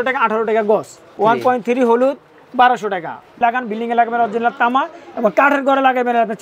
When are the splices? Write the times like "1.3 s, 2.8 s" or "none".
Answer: 1.2 s, 3.4 s